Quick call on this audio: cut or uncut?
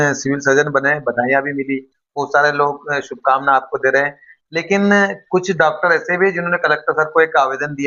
uncut